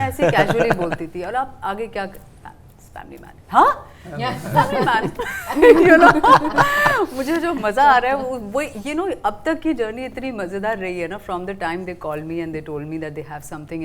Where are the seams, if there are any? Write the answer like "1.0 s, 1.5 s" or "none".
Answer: none